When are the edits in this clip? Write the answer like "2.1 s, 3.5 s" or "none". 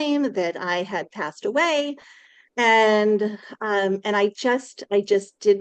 none